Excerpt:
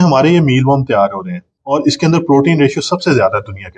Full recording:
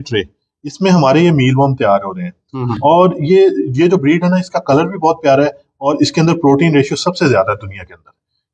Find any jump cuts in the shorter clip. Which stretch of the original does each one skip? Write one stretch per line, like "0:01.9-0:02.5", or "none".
0:02.4-0:05.7